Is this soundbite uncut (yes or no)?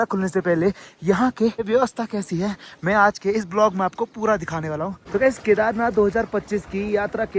no